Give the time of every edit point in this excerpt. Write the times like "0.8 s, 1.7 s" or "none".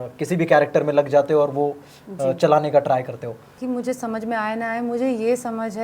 3.6 s